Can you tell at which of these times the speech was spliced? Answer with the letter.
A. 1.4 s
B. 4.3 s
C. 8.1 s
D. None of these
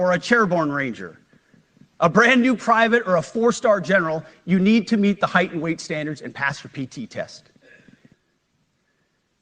C